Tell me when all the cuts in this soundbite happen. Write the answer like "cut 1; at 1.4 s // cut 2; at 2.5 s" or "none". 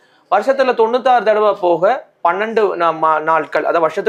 none